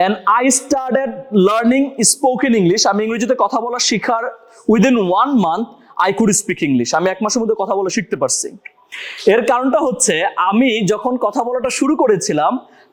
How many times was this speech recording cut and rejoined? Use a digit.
0